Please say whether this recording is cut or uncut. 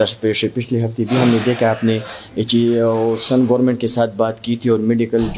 uncut